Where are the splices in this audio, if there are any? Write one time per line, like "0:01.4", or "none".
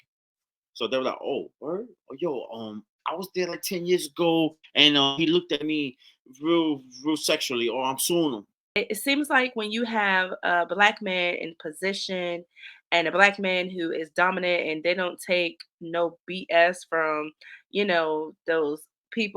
0:08.8